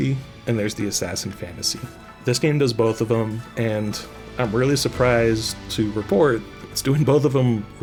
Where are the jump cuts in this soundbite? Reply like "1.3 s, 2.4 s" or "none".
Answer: none